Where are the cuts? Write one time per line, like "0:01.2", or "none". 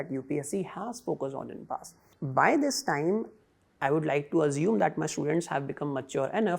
0:02.1